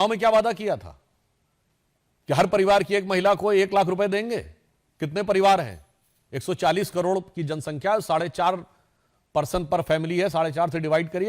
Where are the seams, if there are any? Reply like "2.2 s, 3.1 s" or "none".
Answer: none